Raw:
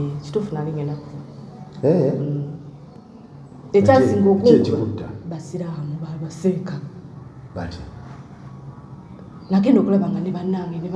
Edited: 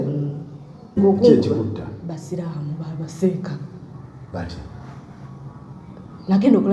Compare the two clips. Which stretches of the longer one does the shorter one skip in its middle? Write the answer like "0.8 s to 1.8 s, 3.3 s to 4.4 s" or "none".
3.1 s to 4.2 s